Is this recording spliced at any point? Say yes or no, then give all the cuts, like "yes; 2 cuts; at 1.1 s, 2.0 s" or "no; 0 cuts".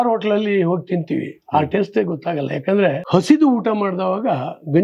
yes; 1 cut; at 3.0 s